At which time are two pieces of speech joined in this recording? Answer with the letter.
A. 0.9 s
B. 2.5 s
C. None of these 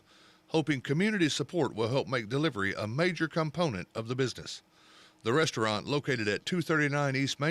C